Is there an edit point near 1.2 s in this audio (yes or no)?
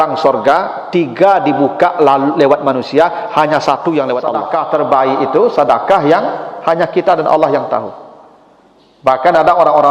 no